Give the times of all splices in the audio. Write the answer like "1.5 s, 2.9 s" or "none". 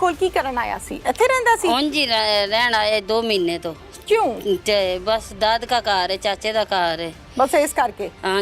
none